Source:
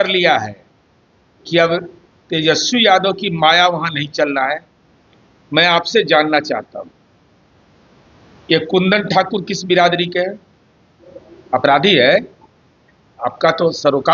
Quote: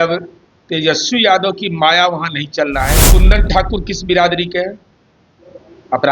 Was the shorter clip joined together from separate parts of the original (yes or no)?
yes